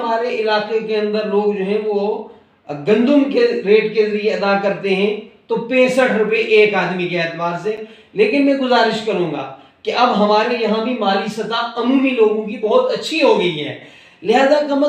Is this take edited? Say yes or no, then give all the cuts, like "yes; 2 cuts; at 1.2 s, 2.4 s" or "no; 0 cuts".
no; 0 cuts